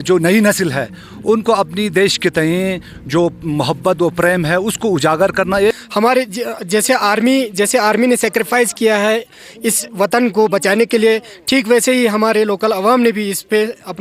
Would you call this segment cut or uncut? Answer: cut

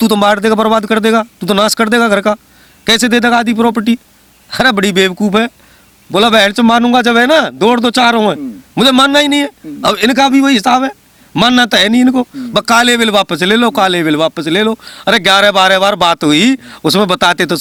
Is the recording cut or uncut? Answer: uncut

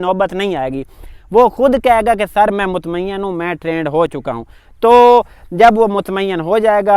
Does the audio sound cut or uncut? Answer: uncut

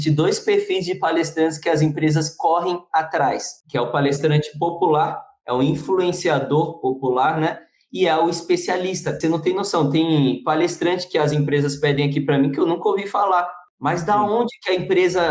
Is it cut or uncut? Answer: cut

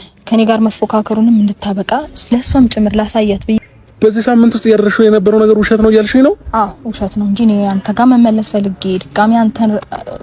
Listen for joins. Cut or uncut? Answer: cut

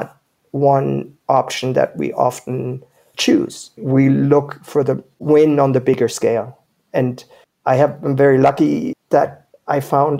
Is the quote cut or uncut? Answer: cut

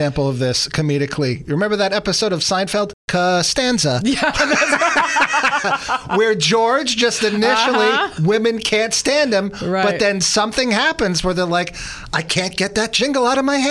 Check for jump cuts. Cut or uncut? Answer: uncut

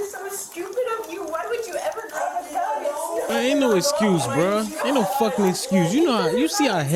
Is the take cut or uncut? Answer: cut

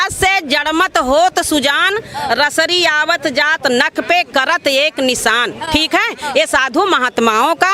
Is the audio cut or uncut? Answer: uncut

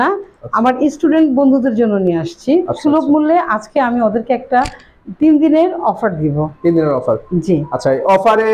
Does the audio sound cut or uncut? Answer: uncut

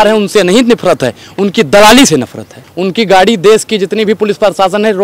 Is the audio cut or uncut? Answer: cut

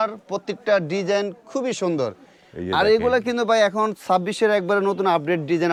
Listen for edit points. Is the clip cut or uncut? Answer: uncut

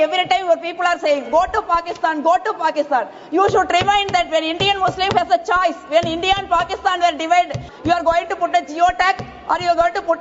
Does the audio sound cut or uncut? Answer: cut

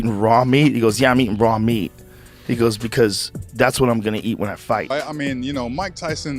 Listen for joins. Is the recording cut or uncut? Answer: cut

